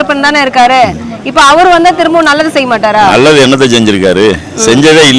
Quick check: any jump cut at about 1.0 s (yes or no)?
no